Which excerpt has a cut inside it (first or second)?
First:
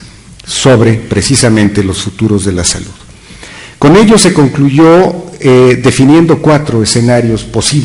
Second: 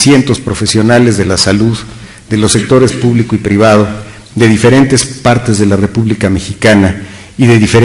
second